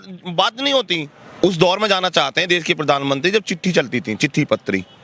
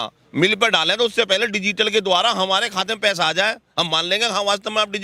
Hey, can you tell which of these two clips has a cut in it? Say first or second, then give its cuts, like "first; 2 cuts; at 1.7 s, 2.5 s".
first; 1 cut; at 1.2 s